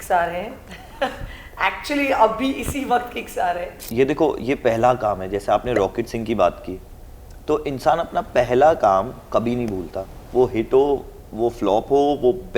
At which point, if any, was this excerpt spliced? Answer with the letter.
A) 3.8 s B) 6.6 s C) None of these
A